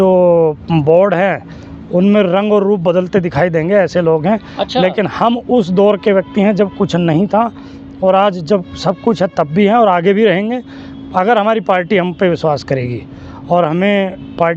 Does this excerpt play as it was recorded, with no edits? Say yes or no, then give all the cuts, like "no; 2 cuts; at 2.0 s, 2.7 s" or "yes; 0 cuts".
yes; 0 cuts